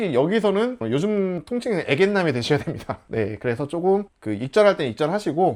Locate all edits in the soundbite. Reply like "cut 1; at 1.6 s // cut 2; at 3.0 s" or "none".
none